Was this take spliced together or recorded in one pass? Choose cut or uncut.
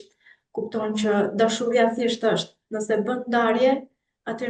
uncut